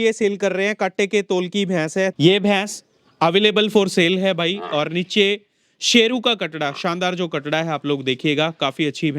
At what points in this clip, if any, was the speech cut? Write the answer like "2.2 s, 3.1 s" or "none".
2.1 s